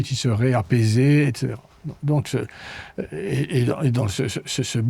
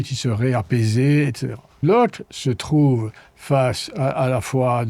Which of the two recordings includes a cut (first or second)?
second